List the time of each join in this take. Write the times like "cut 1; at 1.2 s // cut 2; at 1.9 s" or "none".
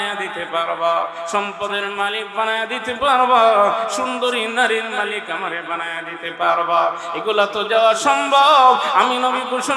none